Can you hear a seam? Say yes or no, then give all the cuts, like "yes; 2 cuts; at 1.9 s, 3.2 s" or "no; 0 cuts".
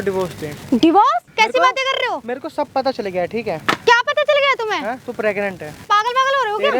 yes; 2 cuts; at 1.3 s, 5.7 s